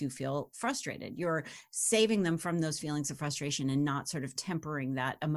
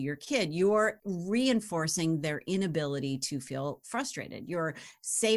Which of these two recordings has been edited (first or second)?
second